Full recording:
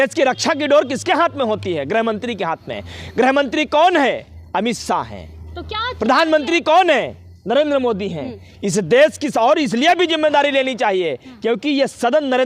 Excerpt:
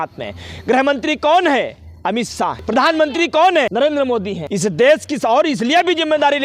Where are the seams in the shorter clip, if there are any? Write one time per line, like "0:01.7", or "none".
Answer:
0:02.6
0:04.0

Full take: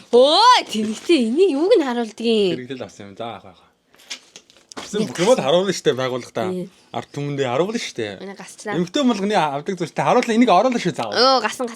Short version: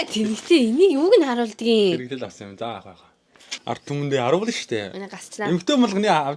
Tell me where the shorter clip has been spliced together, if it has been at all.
0:03.5

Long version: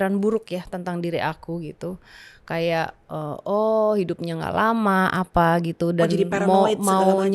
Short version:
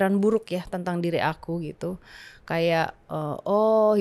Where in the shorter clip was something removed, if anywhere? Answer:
none

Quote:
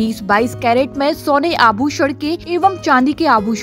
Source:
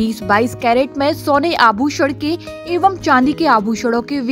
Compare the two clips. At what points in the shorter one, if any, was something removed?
0:02.4

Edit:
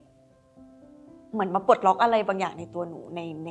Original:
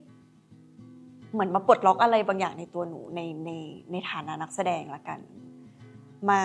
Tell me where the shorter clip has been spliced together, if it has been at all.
none

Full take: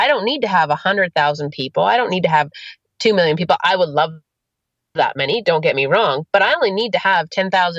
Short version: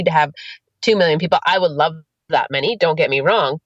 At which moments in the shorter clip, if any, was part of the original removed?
0:02.1

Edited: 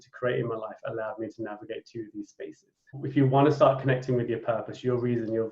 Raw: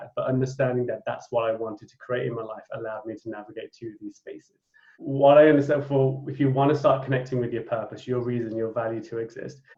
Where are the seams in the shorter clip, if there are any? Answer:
0:03.0

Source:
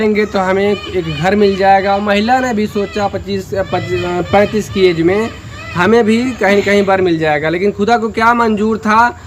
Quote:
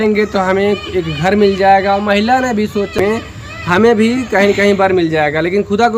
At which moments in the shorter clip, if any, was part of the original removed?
0:03.0

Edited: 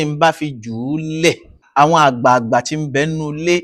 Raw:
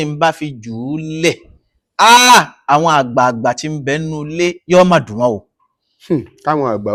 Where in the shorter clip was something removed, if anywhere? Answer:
0:01.6

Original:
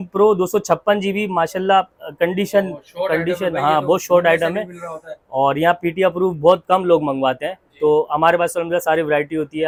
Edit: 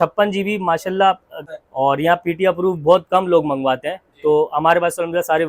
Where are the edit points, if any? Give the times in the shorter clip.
0:01.3

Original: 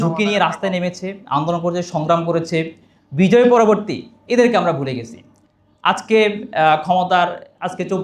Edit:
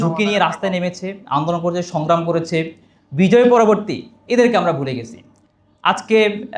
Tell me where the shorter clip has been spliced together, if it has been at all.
none

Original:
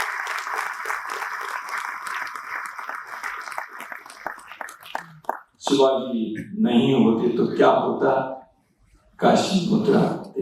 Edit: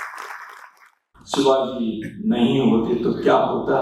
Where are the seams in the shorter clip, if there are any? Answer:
0:01.1

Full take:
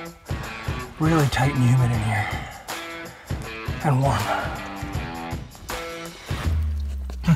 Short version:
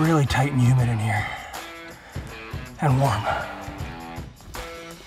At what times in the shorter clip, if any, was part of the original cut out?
0:03.5

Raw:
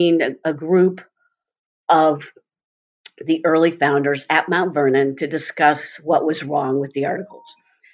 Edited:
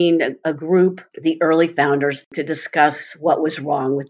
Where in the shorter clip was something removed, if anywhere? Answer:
0:01.1
0:02.3

